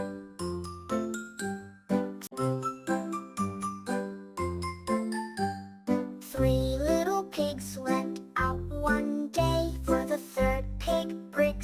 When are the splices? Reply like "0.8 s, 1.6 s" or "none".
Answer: 1.0 s, 2.2 s

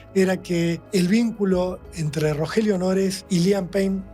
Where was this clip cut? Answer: 0.8 s, 3.2 s

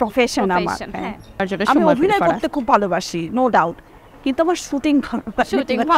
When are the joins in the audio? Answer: 1.4 s

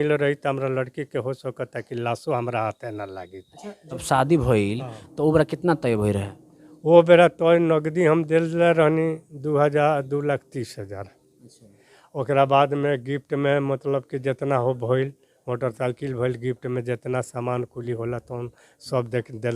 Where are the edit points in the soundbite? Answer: 4.0 s

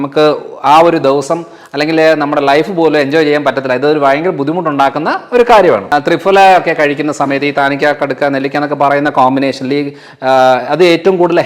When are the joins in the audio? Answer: 5.8 s

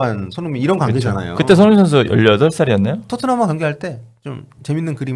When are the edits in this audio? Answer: 3.1 s

